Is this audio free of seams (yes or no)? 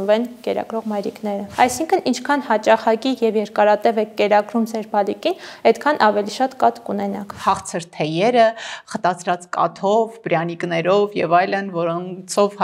no